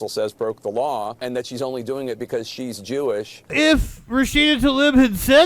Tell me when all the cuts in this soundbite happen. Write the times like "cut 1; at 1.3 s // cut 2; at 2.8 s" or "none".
cut 1; at 1.2 s // cut 2; at 3.5 s

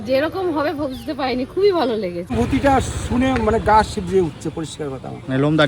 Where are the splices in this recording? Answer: cut 1; at 2.3 s

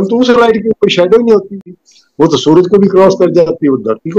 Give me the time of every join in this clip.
cut 1; at 1.6 s

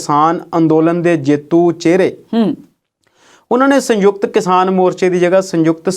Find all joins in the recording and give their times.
none

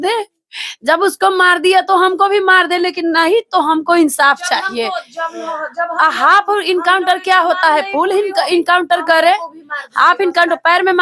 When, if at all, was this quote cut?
none

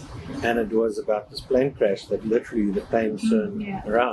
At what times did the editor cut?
none

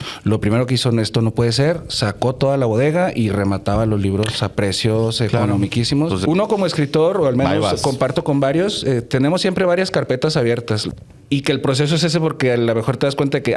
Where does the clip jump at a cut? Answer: cut 1; at 6.2 s // cut 2; at 10.8 s

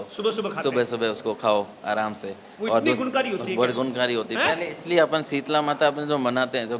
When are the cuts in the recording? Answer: none

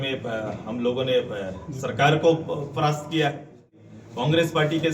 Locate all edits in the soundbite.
cut 1; at 3.8 s

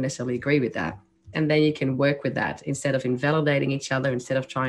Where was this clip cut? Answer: cut 1; at 1.2 s

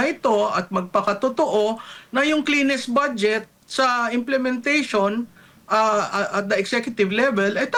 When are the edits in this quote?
none

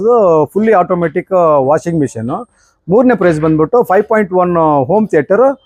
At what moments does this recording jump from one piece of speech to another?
none

